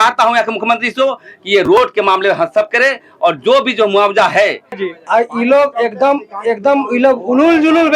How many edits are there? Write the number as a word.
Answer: one